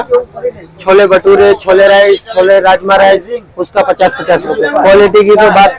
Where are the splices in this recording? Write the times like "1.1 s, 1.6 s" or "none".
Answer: 4.7 s